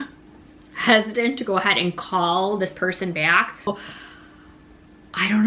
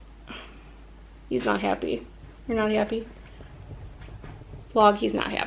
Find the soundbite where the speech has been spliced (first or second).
first